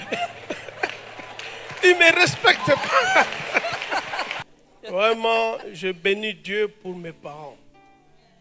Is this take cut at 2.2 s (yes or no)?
no